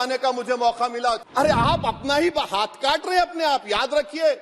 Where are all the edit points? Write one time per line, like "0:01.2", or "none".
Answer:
0:01.2

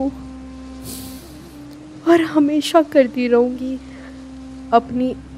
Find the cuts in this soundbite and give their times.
none

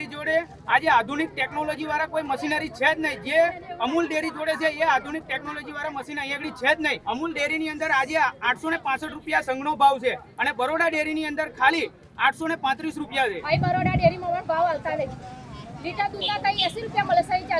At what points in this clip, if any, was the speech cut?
0:07.0
0:13.4

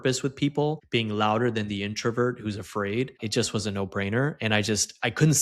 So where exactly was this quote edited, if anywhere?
0:00.8
0:03.2

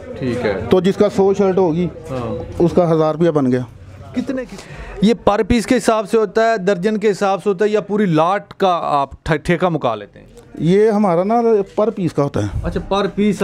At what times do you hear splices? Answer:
0:04.4

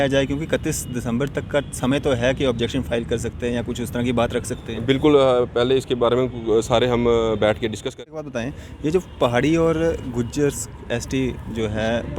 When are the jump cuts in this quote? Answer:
0:07.9

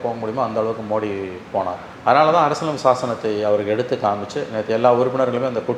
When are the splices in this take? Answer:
none

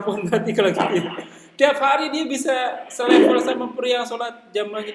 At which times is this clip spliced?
none

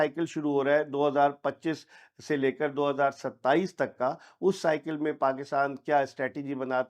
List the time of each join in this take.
none

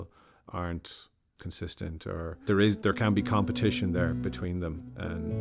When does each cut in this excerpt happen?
none

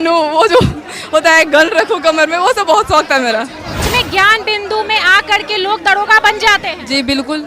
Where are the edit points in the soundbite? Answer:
0:03.8

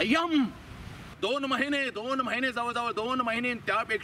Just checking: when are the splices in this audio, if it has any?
0:01.1

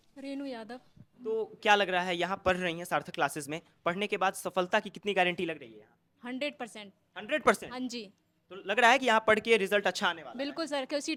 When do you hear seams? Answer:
none

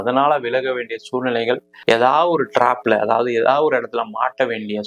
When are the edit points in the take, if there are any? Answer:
0:01.7

